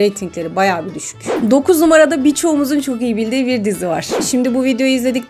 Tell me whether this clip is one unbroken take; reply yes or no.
no